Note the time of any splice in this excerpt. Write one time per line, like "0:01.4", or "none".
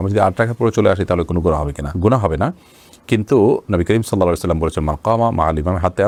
none